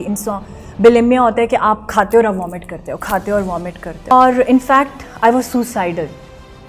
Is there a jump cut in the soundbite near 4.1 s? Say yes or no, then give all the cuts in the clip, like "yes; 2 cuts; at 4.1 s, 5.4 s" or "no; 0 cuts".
yes; 1 cut; at 4.1 s